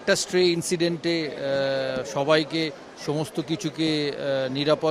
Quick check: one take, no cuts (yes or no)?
yes